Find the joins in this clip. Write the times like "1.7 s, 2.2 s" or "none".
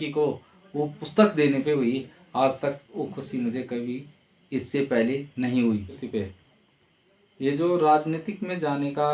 6.0 s